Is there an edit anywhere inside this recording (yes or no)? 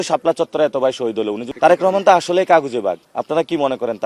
yes